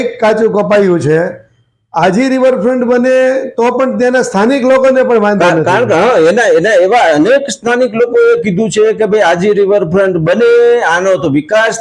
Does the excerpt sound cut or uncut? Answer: uncut